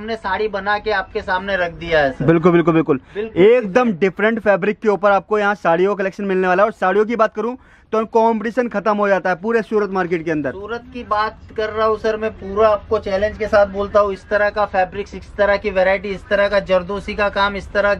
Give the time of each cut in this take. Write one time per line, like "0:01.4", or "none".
none

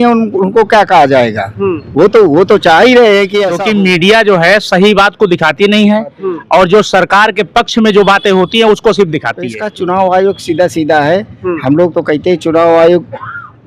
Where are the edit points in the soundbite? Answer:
0:03.5
0:09.6

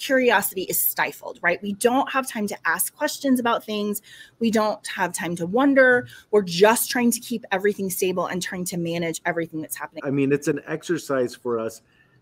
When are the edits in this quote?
0:09.9

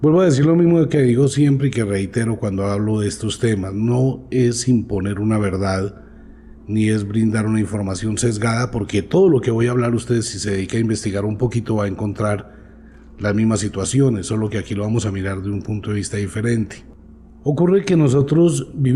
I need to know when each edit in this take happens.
none

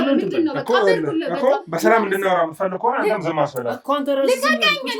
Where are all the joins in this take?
none

